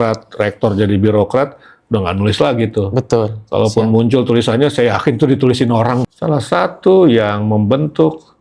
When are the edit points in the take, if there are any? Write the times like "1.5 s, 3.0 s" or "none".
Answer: 6.0 s